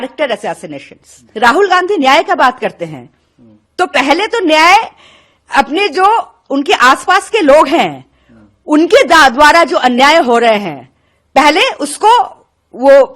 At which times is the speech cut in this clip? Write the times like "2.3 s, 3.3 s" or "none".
1.2 s